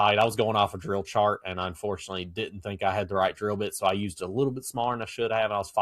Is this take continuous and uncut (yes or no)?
yes